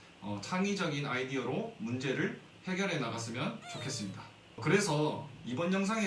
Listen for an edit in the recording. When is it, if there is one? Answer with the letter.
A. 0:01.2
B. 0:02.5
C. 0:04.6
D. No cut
C